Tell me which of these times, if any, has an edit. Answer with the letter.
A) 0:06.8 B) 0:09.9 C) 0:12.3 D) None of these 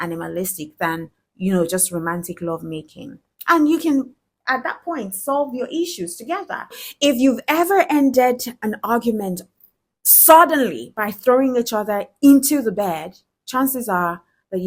A